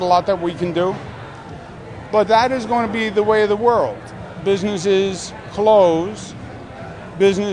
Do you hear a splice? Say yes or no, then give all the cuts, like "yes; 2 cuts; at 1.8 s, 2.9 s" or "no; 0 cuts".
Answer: no; 0 cuts